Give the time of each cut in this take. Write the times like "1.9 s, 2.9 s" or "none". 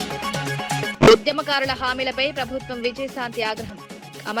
0.9 s